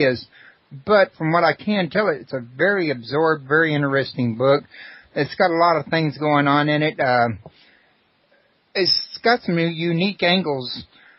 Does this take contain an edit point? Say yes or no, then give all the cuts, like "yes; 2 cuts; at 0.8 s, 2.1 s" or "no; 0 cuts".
no; 0 cuts